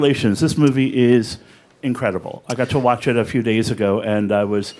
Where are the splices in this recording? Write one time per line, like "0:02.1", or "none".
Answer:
none